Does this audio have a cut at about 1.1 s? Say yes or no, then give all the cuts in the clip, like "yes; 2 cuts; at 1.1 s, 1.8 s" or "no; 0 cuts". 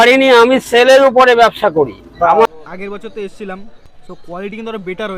no; 2 cuts; at 2.5 s, 3.8 s